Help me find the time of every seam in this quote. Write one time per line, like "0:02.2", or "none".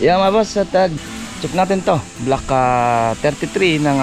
0:00.9